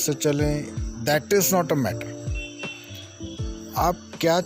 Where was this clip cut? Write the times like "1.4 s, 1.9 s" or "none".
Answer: 1.9 s, 3.7 s